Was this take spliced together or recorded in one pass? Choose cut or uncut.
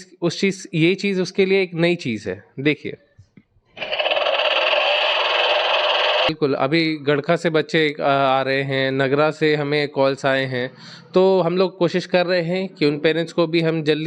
cut